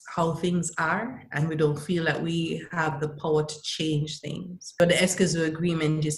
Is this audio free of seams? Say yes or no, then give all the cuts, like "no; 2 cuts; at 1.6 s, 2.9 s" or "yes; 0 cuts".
no; 1 cut; at 4.8 s